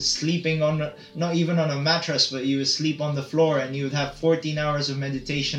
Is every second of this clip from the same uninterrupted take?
yes; 0 cuts

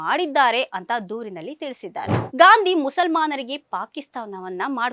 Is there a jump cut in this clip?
yes; 1 cut; at 2.2 s

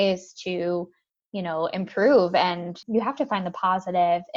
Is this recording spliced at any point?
yes; 1 cut; at 2.7 s

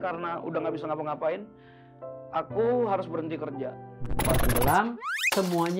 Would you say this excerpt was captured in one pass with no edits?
no; 1 cut; at 4.2 s

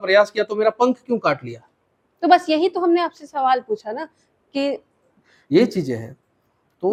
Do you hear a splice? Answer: no; 0 cuts

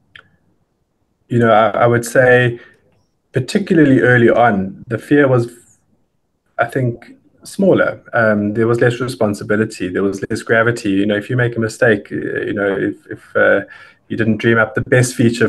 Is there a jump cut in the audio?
no; 0 cuts

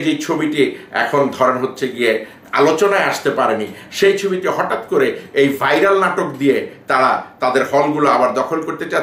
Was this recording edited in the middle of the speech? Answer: no; 0 cuts

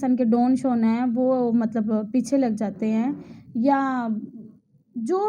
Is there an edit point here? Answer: no; 0 cuts

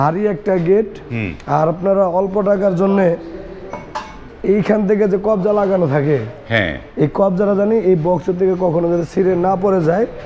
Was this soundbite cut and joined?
no; 0 cuts

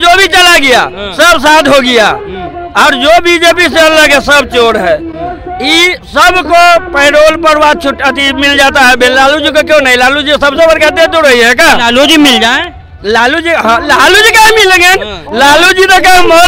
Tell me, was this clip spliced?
no; 0 cuts

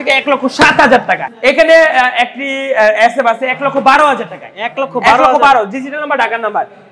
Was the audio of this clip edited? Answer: yes; 1 cut; at 1.2 s

